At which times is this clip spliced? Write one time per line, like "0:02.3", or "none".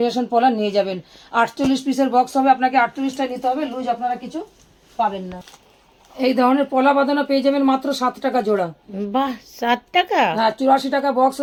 none